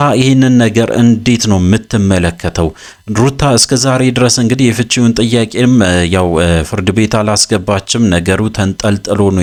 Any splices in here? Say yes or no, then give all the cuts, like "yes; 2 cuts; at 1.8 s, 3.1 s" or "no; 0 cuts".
no; 0 cuts